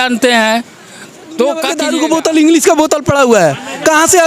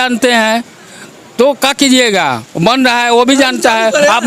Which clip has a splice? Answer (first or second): first